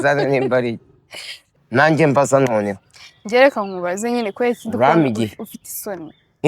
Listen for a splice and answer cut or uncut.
cut